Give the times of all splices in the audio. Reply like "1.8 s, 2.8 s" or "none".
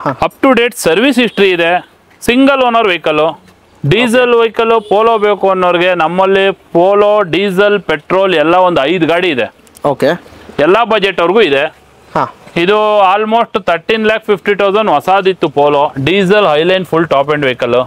none